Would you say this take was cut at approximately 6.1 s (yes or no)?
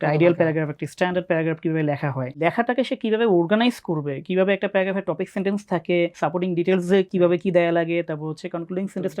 yes